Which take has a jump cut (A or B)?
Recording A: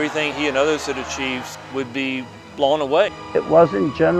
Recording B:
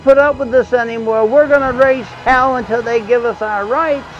A